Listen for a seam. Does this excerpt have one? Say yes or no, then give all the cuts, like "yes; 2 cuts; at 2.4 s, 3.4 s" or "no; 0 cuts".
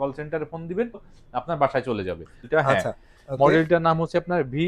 yes; 2 cuts; at 1.1 s, 2.5 s